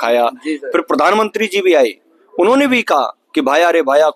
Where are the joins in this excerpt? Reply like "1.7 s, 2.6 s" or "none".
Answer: none